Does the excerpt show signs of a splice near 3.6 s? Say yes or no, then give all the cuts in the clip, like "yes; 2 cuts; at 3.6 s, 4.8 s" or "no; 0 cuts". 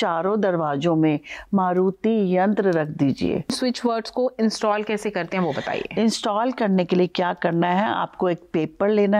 yes; 1 cut; at 3.6 s